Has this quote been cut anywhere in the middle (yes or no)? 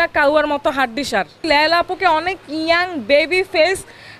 yes